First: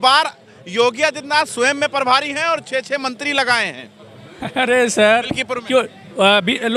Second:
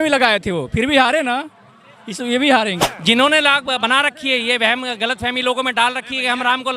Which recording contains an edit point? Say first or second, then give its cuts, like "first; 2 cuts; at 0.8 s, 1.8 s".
second; 1 cut; at 2.9 s